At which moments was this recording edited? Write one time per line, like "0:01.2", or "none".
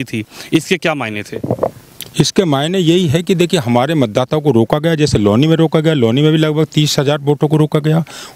none